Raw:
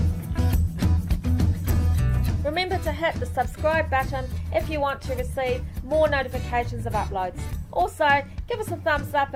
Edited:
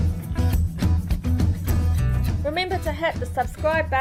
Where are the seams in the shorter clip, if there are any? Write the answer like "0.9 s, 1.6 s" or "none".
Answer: none